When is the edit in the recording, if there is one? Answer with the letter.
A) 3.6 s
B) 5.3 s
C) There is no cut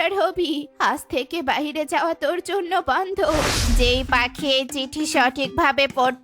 A